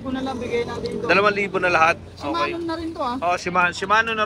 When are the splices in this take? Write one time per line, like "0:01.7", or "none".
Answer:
none

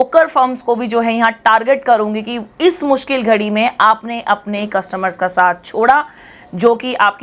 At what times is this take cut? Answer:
none

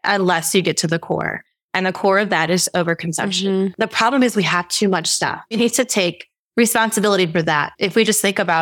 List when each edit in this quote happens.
0:03.7
0:05.5
0:07.8

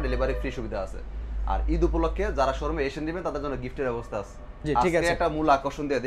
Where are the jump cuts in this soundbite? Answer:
none

